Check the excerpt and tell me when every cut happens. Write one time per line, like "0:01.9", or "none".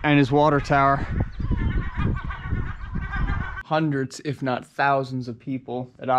0:03.5